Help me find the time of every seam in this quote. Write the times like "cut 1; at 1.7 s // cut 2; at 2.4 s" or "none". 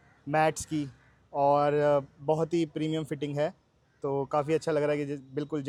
none